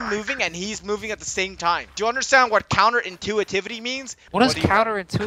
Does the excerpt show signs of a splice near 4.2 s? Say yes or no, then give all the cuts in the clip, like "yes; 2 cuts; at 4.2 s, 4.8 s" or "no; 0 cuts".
yes; 1 cut; at 4.2 s